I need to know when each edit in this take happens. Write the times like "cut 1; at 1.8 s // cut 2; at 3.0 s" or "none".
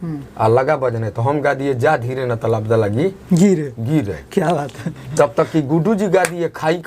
none

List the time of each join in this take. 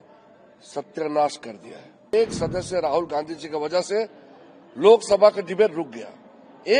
cut 1; at 2.1 s

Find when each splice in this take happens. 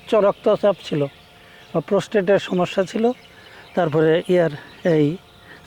none

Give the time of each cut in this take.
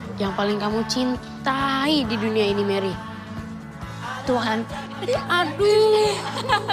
none

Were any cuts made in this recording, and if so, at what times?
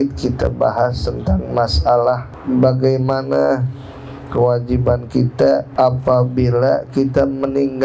cut 1; at 2.3 s // cut 2; at 5.7 s

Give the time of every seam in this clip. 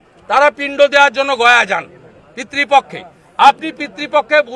none

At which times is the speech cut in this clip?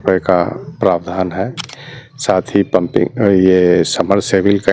cut 1; at 1.7 s

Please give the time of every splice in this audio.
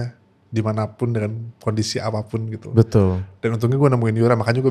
none

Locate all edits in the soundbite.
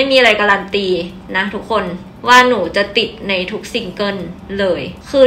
none

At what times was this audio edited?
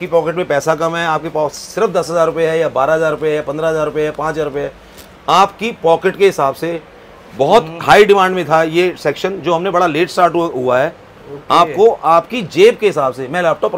none

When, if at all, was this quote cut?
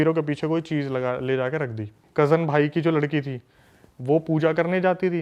cut 1; at 2.0 s

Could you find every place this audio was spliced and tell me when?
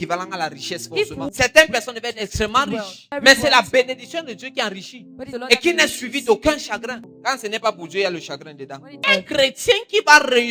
cut 1; at 1.3 s // cut 2; at 3.1 s // cut 3; at 5.3 s // cut 4; at 7.1 s // cut 5; at 9.0 s

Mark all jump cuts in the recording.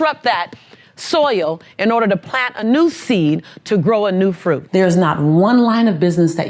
cut 1; at 4.6 s

